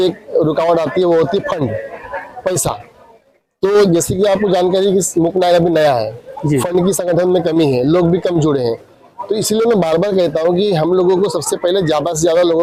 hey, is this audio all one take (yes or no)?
yes